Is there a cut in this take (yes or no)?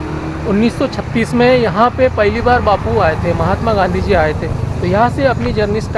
no